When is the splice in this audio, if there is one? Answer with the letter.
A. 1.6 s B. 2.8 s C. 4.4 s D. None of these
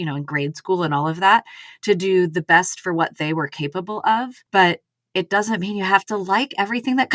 C